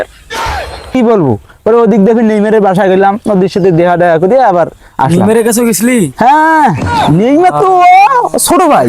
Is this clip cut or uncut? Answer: cut